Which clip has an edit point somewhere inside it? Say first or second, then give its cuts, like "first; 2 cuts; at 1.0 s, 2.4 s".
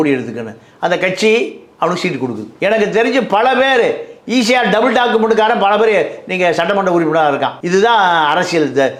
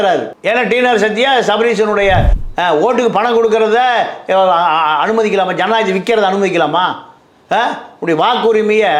second; 1 cut; at 2.4 s